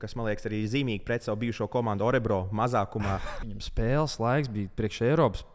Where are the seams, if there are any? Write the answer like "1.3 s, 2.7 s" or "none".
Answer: 3.3 s

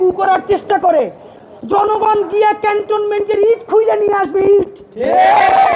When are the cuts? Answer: none

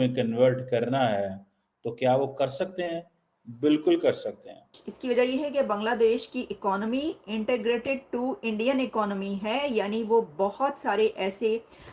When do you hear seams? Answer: 4.9 s

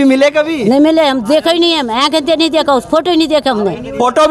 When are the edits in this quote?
none

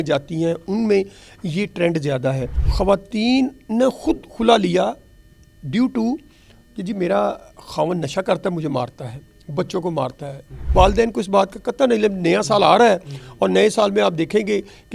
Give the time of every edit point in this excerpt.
2.6 s, 10.6 s

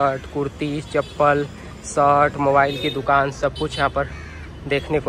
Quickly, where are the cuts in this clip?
none

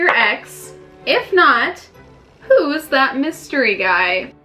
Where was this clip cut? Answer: none

